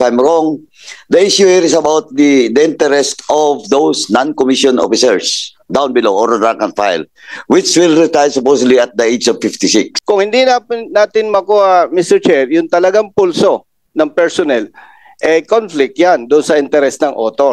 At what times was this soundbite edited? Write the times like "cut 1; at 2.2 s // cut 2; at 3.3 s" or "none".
cut 1; at 10.0 s